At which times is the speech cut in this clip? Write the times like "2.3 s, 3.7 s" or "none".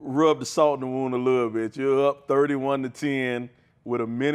none